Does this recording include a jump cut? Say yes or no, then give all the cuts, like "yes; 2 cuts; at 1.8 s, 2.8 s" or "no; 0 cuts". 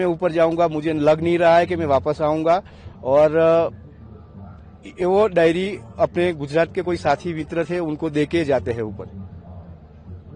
no; 0 cuts